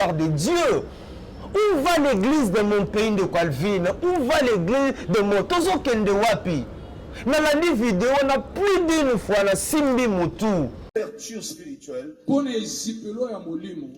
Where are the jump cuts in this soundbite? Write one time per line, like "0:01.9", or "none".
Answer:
0:10.9

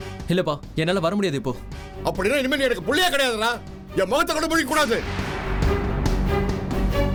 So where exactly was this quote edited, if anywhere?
none

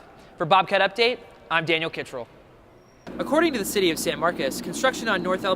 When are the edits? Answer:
0:03.0

